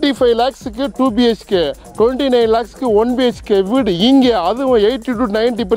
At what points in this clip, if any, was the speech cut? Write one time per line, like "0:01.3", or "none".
none